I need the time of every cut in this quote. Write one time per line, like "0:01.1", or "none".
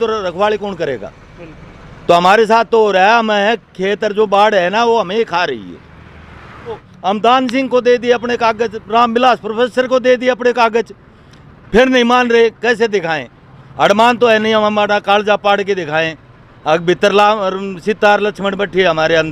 0:06.9